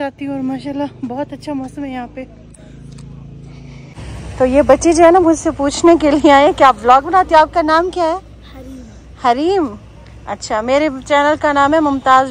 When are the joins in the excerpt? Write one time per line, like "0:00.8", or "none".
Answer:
0:04.0